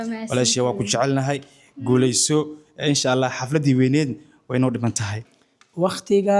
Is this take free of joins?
no; 1 cut; at 5.3 s

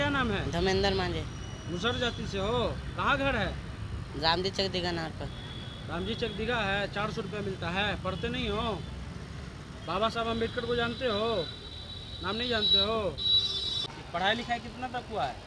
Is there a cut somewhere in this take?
yes; 1 cut; at 13.7 s

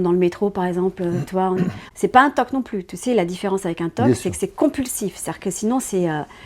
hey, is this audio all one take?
no; 1 cut; at 1.8 s

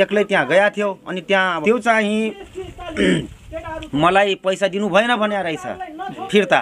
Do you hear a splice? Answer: yes; 1 cut; at 1.6 s

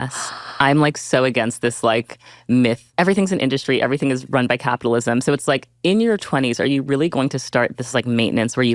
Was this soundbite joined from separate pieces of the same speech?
yes; 1 cut; at 2.8 s

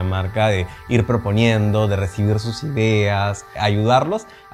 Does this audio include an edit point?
no; 0 cuts

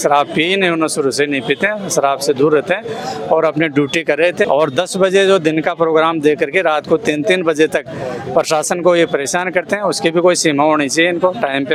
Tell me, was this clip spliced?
no; 0 cuts

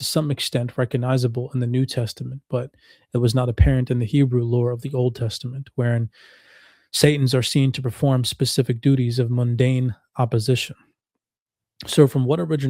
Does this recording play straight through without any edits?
yes; 0 cuts

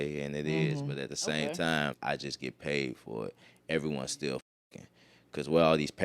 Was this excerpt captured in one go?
no; 1 cut; at 2.0 s

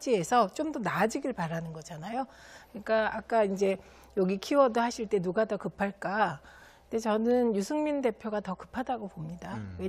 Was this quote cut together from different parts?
no; 0 cuts

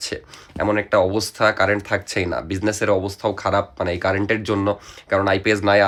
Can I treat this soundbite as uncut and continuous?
yes; 0 cuts

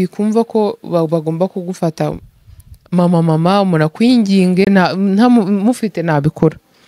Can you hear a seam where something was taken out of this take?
yes; 1 cut; at 4.7 s

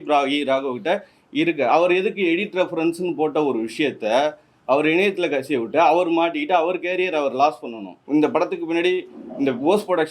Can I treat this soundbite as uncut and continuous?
no; 1 cut; at 7.9 s

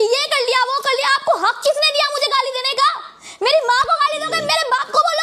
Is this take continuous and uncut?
yes; 0 cuts

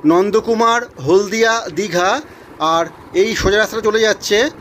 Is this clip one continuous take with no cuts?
yes; 0 cuts

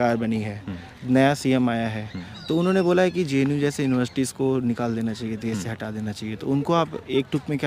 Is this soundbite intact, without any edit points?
yes; 0 cuts

